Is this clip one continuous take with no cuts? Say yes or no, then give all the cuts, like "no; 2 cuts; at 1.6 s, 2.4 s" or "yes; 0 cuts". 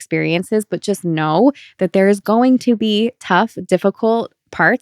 yes; 0 cuts